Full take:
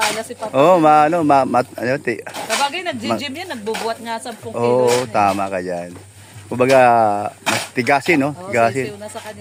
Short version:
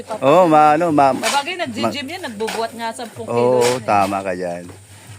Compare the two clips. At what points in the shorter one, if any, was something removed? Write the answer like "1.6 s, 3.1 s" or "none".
1.2 s